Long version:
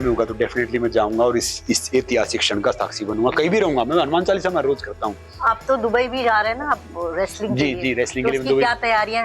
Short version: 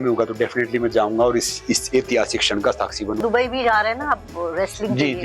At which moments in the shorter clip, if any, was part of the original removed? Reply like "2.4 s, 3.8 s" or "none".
3.2 s